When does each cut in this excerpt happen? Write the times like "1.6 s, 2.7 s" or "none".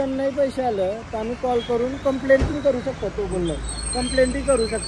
none